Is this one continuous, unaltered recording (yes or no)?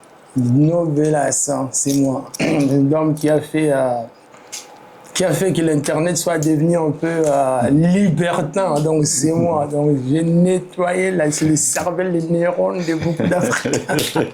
yes